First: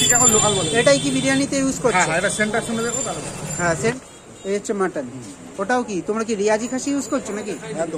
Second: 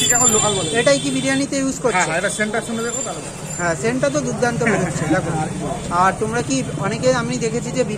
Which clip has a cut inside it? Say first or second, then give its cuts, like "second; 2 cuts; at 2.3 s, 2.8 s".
first; 1 cut; at 4.0 s